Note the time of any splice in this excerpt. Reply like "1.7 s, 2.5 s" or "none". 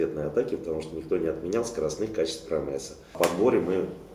3.1 s